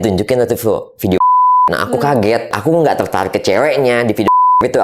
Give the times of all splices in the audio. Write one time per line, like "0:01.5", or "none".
0:02.5